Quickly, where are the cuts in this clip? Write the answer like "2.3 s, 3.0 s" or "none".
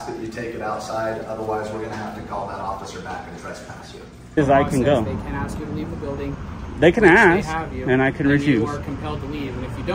4.4 s